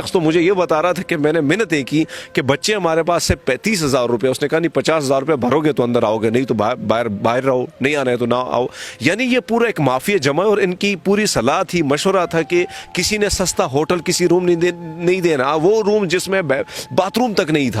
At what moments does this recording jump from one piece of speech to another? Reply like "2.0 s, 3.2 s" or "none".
none